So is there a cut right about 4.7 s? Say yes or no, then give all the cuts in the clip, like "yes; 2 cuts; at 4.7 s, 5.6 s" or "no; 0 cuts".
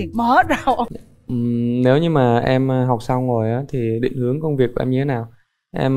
no; 1 cut; at 0.9 s